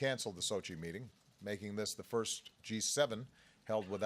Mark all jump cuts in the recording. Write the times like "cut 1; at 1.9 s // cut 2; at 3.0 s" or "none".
cut 1; at 2.0 s